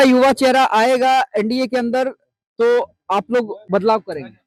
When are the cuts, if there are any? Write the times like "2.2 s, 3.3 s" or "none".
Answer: none